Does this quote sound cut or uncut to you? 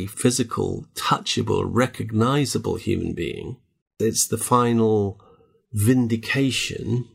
cut